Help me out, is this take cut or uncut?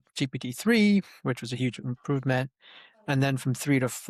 uncut